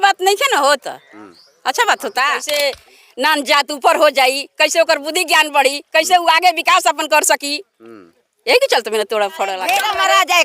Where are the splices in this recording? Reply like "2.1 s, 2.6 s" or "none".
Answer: 2.4 s, 9.6 s